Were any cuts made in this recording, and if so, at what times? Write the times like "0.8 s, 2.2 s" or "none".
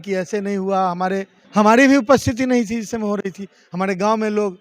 1.4 s